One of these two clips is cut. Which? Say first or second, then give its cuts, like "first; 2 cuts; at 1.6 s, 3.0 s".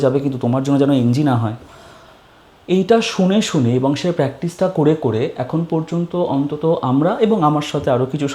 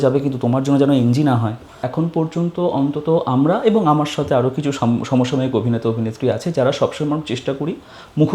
second; 1 cut; at 1.8 s